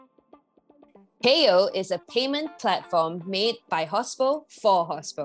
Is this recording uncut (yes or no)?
no